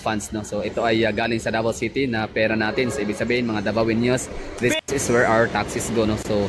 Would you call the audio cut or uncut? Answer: cut